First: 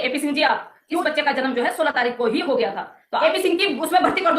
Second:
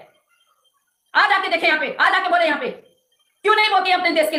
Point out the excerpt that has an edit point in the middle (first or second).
first